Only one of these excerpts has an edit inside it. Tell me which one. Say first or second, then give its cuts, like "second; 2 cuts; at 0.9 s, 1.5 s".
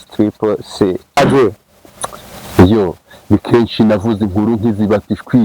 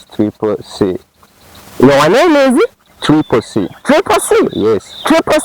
first; 1 cut; at 1.2 s